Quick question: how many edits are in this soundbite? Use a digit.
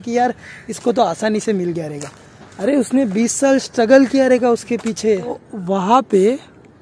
1